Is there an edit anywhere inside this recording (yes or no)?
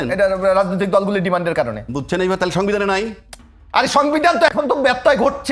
no